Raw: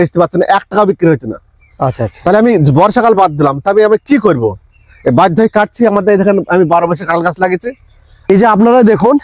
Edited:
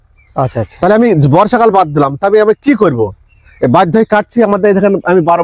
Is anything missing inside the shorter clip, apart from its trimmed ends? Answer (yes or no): no